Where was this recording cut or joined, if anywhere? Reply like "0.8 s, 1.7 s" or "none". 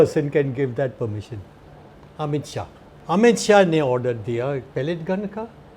2.9 s

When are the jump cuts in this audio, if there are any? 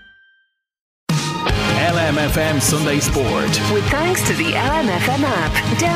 1.0 s

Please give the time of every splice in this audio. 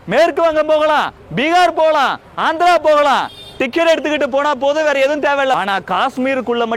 5.6 s

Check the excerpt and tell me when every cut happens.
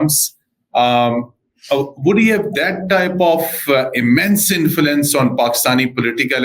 none

